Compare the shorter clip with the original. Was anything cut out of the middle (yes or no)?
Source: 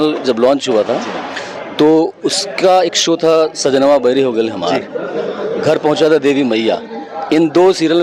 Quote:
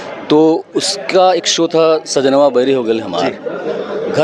no